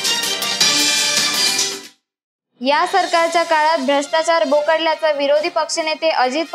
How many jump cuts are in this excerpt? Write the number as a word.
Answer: one